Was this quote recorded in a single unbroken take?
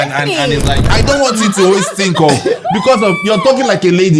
no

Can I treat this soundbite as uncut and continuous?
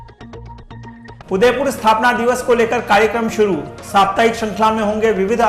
yes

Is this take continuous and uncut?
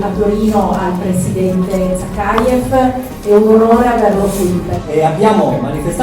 no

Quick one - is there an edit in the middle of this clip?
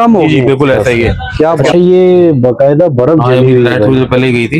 yes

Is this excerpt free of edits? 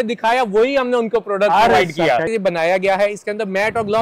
no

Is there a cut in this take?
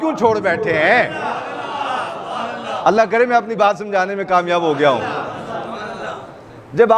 no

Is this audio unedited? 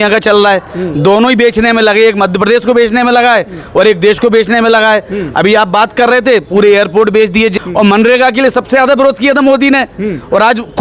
no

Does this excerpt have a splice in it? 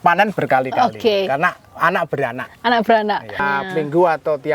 yes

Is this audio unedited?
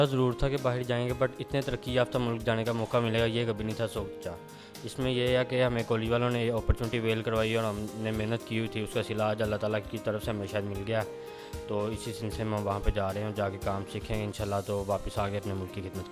yes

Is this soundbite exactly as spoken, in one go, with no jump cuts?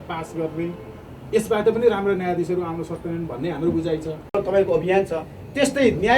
no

